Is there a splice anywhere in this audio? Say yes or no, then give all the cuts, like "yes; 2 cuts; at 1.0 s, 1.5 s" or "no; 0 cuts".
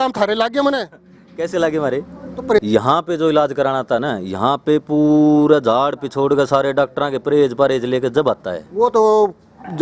yes; 1 cut; at 2.6 s